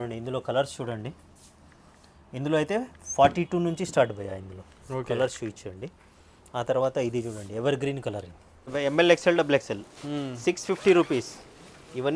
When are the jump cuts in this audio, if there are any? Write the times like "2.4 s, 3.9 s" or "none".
8.7 s